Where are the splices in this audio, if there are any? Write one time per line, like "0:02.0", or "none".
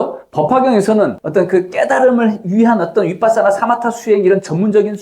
0:01.2